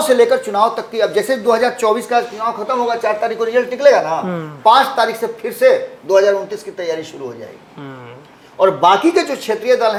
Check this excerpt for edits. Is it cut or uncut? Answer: uncut